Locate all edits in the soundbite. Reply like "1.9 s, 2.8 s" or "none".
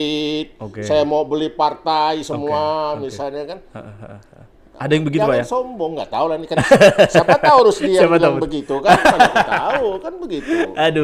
none

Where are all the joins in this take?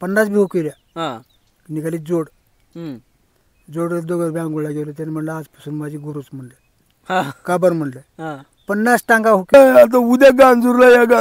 9.5 s

